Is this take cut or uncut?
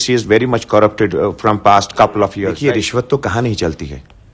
cut